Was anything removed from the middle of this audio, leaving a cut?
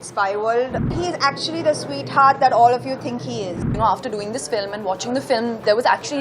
yes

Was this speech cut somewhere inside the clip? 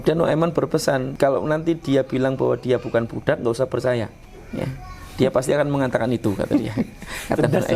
yes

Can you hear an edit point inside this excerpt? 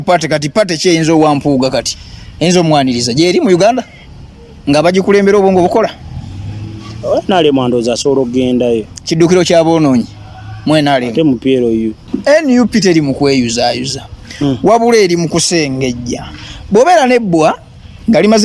yes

